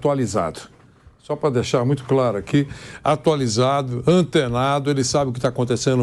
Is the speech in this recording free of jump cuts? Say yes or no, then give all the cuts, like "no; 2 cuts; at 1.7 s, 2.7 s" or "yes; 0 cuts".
yes; 0 cuts